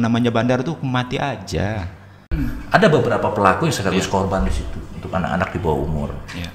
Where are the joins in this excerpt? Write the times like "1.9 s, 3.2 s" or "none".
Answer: 2.3 s